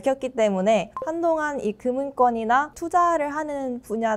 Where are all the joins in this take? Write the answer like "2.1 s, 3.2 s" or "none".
1.0 s, 2.8 s